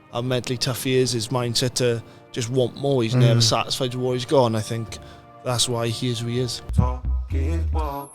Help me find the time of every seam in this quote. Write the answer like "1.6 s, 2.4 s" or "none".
6.6 s